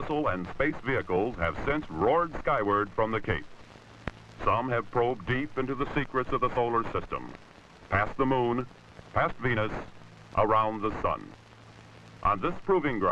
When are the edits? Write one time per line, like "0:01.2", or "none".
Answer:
none